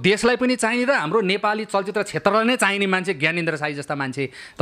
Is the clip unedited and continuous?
yes; 0 cuts

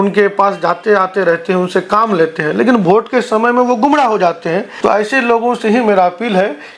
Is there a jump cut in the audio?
yes; 1 cut; at 4.7 s

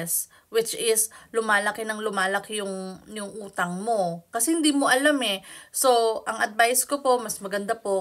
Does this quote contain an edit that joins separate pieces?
no; 0 cuts

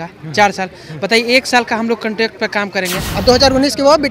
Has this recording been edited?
yes; 1 cut; at 3.0 s

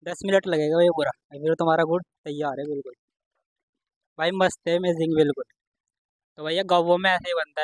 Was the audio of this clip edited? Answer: yes; 1 cut; at 6.0 s

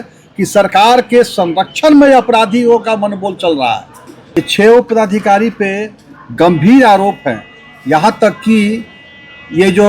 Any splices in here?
yes; 1 cut; at 4.3 s

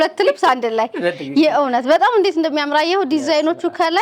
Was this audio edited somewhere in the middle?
no; 0 cuts

